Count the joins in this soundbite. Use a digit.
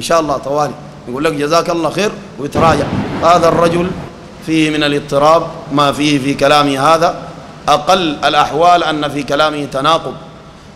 1